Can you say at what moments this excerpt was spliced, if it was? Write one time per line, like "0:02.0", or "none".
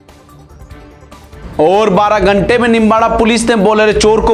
none